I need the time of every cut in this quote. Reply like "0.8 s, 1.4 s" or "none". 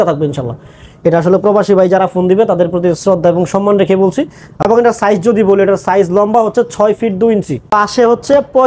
4.4 s, 7.7 s